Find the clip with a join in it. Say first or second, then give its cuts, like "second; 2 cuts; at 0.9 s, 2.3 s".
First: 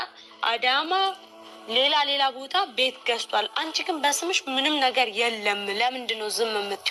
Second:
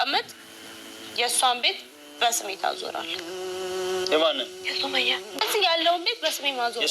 second; 1 cut; at 5.4 s